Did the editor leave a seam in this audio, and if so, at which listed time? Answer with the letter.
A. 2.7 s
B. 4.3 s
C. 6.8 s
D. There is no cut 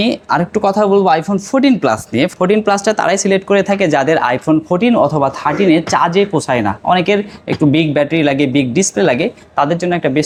D